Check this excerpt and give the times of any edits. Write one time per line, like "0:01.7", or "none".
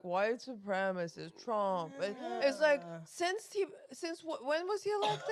none